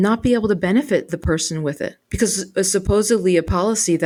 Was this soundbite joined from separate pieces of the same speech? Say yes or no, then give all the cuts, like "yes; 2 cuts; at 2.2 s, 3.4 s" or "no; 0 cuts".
no; 0 cuts